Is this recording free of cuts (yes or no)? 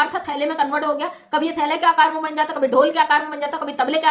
yes